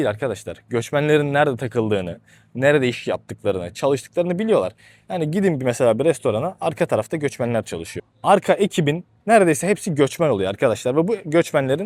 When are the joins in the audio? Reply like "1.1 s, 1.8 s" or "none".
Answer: none